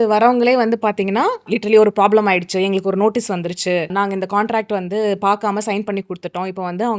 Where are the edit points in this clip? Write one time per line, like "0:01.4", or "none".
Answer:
none